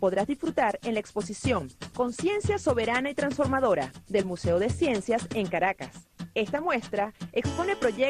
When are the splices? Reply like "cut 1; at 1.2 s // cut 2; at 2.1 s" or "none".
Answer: cut 1; at 5.5 s